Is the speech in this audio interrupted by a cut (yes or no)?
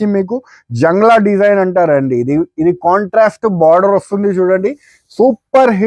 no